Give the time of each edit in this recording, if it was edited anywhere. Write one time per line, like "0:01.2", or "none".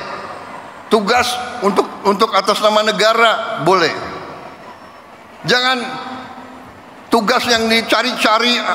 none